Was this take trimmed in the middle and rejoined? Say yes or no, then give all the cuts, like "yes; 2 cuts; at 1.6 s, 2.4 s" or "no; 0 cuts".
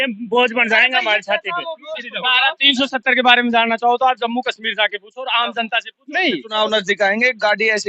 yes; 2 cuts; at 2.1 s, 6.5 s